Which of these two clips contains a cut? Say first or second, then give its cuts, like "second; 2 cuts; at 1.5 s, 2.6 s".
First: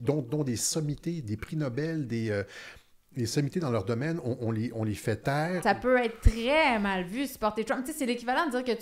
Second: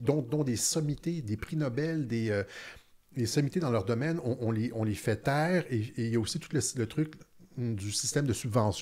first; 1 cut; at 5.6 s